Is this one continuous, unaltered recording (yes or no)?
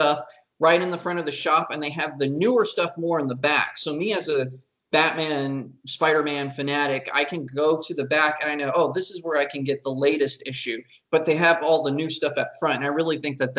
yes